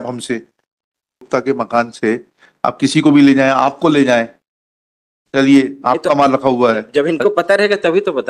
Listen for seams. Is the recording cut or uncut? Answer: cut